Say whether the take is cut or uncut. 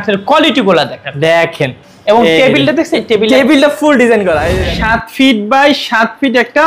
cut